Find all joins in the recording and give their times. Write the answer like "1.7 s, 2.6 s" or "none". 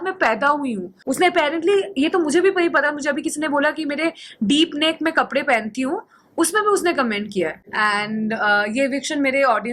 1.0 s, 7.6 s